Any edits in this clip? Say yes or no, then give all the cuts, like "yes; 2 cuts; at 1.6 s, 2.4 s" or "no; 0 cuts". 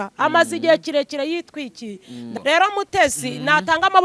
yes; 1 cut; at 2.2 s